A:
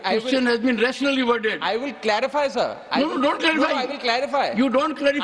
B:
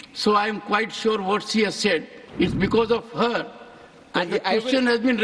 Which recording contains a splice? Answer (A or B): B